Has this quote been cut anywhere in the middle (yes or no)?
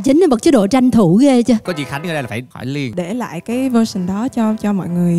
yes